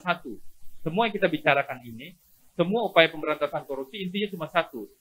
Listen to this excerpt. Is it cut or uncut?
uncut